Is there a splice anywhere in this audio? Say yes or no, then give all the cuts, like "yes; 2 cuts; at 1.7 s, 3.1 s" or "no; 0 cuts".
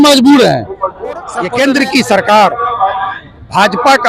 yes; 1 cut; at 1.4 s